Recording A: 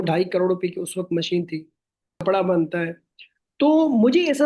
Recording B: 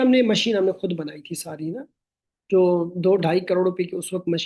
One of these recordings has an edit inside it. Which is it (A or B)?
A